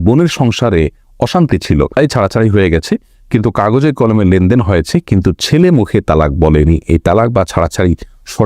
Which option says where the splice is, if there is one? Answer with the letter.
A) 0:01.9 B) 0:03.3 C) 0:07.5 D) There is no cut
A